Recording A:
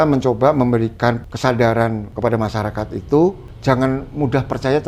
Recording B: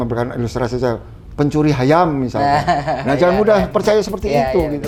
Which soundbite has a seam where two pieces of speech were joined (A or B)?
A